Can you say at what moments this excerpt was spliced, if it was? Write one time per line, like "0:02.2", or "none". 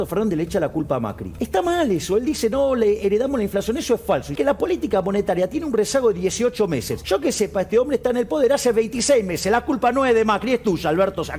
0:01.2
0:04.3
0:06.9